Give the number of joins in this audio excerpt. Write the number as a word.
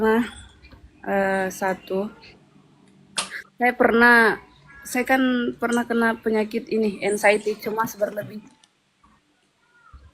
zero